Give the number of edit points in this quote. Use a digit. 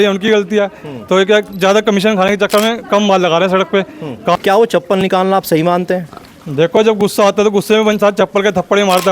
1